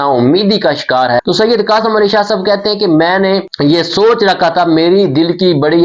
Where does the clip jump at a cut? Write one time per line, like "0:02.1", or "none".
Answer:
0:01.2